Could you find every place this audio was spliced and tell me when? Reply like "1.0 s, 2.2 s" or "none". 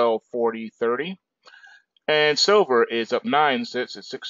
3.2 s